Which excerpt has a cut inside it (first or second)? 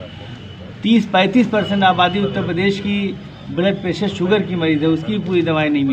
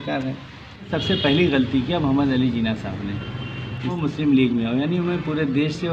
second